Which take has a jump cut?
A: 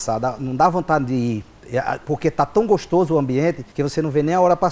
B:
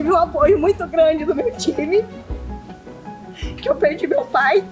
A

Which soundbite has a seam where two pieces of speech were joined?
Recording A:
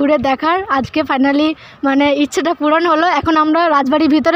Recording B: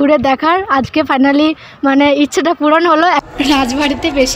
B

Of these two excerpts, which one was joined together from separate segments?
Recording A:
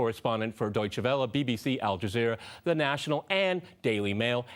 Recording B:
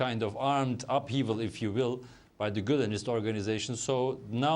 B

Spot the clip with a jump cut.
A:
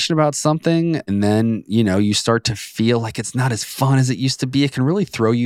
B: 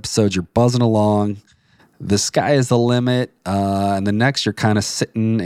A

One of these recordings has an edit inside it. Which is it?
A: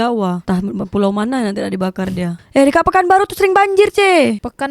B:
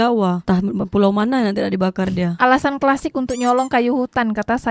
A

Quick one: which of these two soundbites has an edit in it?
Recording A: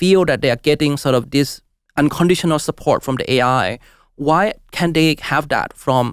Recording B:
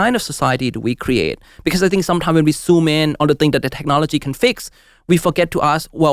B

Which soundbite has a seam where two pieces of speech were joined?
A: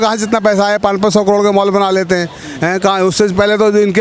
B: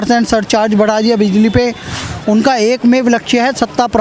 B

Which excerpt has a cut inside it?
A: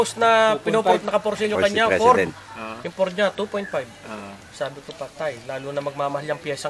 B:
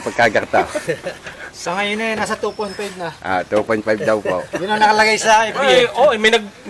B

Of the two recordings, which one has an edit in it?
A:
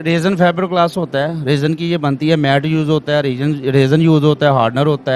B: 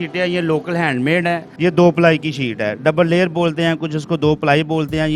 B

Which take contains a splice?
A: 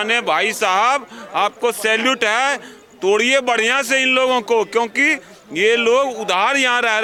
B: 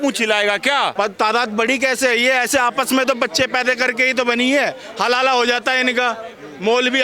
B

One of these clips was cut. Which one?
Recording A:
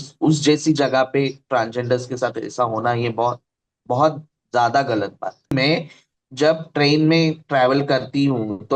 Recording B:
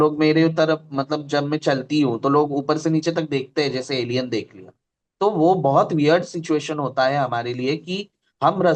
A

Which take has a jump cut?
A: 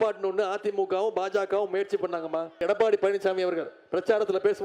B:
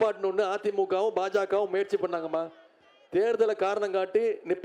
A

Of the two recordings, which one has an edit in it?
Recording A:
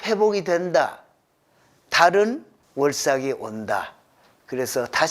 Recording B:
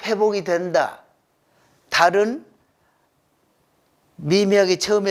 A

